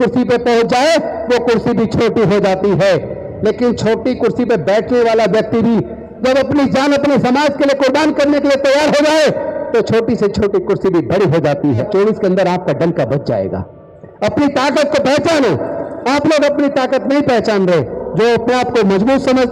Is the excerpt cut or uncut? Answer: cut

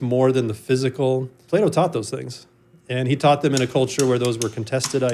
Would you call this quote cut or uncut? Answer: cut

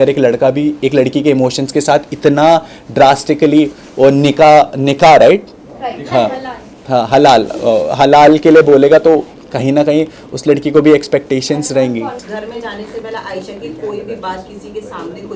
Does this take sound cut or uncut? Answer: uncut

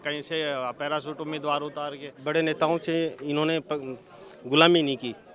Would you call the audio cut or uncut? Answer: cut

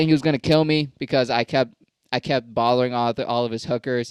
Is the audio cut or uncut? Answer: uncut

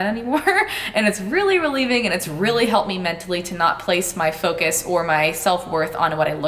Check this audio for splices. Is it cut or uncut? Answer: uncut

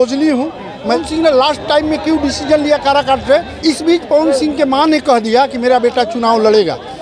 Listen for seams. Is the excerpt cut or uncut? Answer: cut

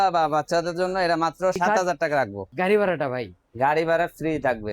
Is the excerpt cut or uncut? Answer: cut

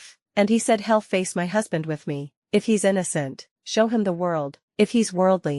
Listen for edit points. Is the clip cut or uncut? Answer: cut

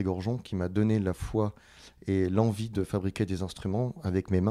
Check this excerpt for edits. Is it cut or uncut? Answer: uncut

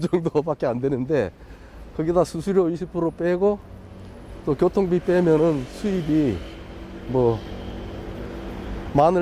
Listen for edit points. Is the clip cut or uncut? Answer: uncut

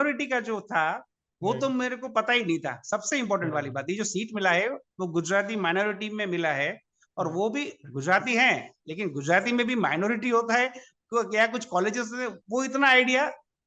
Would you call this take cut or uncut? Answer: uncut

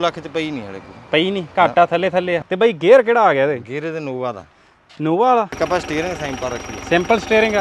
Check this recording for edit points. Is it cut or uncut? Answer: cut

